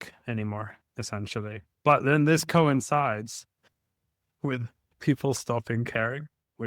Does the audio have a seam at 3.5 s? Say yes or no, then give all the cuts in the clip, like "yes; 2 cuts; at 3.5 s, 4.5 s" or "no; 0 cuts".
no; 1 cut; at 1.6 s